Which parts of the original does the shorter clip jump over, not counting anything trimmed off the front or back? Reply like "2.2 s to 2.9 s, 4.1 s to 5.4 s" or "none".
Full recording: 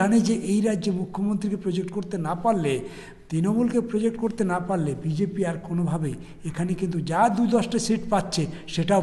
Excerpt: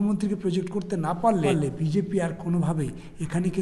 2.7 s to 4.8 s